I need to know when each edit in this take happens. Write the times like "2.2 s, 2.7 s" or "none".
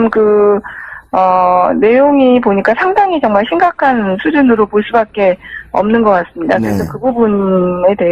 5.1 s